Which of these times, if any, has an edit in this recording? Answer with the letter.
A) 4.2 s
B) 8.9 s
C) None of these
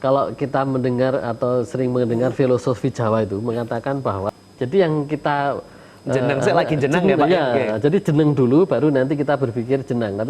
A